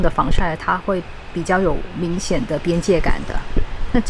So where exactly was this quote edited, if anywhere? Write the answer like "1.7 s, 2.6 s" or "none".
none